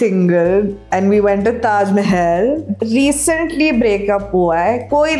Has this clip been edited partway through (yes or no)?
no